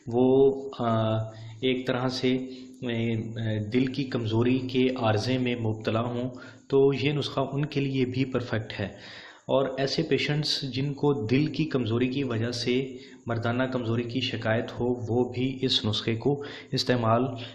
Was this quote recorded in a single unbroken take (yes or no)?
yes